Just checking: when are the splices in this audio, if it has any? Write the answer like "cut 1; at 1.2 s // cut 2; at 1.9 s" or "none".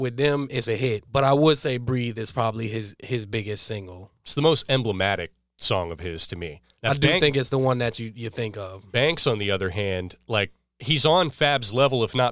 cut 1; at 1.0 s // cut 2; at 6.6 s // cut 3; at 10.7 s